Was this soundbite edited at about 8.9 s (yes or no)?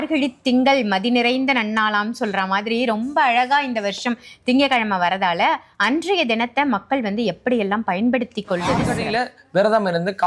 yes